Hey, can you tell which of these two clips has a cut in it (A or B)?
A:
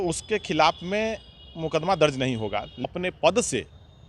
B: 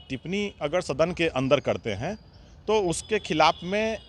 A